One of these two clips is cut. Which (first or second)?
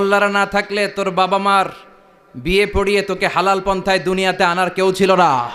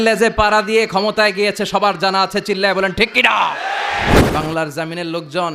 second